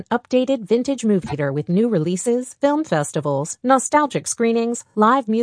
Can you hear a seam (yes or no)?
yes